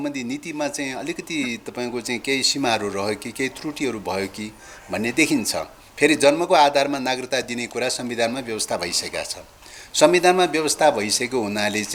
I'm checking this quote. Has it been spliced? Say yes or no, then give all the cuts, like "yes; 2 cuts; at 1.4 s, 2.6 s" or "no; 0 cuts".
no; 0 cuts